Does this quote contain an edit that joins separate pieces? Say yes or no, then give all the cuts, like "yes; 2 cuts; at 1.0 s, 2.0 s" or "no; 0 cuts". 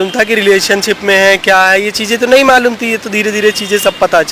no; 0 cuts